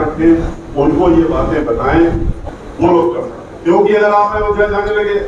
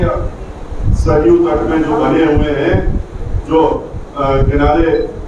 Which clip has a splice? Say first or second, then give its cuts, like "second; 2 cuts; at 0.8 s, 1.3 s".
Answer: first; 1 cut; at 2.3 s